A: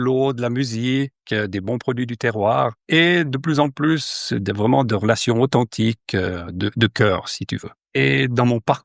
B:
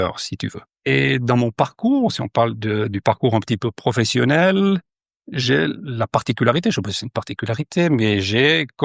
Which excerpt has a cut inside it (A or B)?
A